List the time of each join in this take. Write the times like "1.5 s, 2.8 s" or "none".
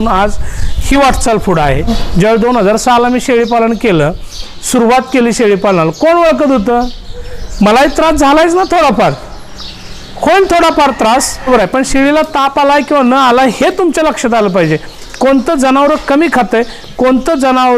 2.0 s, 11.5 s